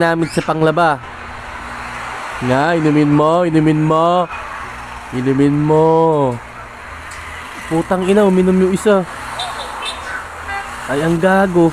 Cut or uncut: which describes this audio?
uncut